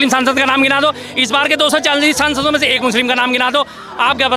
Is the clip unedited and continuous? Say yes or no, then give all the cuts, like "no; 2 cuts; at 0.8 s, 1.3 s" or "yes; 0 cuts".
yes; 0 cuts